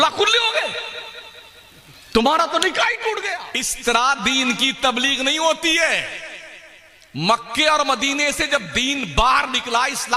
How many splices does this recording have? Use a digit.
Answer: 1